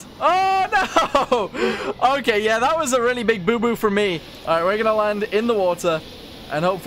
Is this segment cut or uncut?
cut